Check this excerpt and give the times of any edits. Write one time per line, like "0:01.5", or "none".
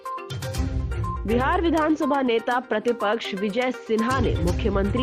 0:01.2